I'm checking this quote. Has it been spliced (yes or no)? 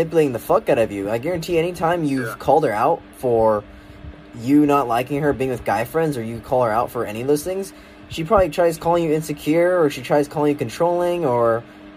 no